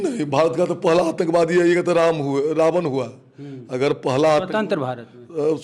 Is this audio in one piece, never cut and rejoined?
yes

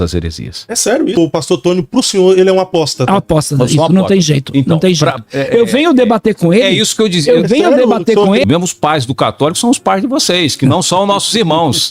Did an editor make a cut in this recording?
yes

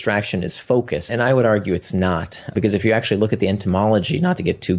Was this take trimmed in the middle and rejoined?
yes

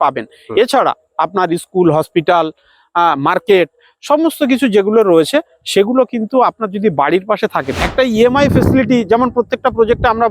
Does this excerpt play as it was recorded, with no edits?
no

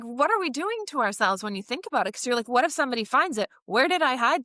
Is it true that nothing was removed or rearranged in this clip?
yes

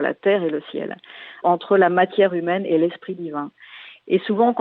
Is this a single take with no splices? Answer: no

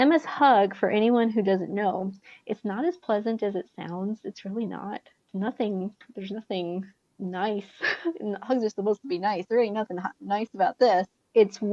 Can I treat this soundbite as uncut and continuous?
yes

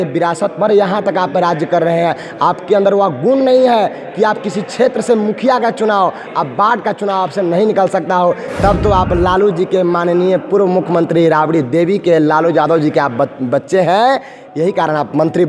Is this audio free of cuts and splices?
yes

